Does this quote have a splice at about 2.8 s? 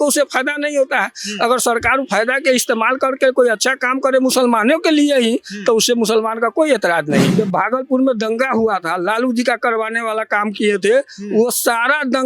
no; 1 cut; at 7.3 s

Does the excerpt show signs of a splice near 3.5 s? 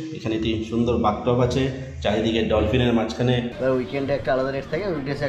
yes; 1 cut; at 3.5 s

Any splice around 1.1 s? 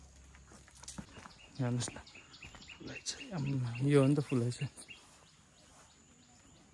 yes; 1 cut; at 1.1 s

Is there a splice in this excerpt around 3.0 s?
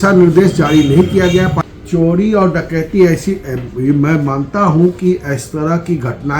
no; 1 cut; at 1.6 s

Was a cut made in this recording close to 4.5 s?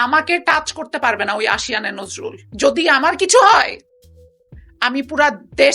no; 1 cut; at 2.5 s

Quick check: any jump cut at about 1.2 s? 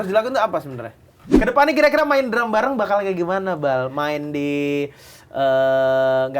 yes; 1 cut; at 1.2 s

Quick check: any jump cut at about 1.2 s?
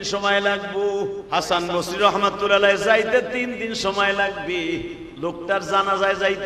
yes; 1 cut; at 1.2 s

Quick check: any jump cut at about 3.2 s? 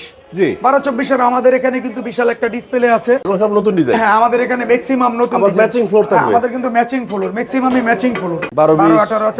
yes; 2 cuts; at 3.2 s, 8.4 s

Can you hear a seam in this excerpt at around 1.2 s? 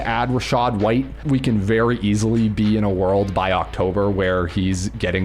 yes; 1 cut; at 1.2 s

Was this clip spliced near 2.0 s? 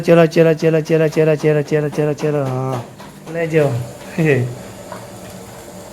no; 1 cut; at 3.4 s

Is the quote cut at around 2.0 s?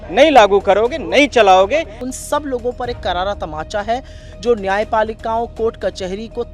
yes; 1 cut; at 2.0 s

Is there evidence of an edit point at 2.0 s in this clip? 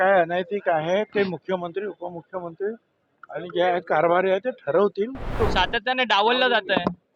no; 1 cut; at 5.4 s

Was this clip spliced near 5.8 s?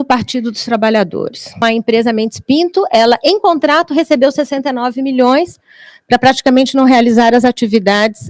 no; 1 cut; at 1.6 s

